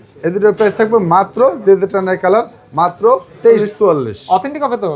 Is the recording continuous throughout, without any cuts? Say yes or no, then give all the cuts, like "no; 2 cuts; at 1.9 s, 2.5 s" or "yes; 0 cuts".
no; 1 cut; at 3.6 s